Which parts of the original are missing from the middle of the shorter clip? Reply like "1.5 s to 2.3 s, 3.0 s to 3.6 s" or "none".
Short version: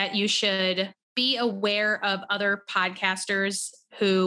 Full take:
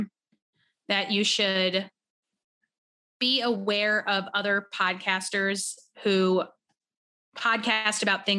2.0 s to 3.1 s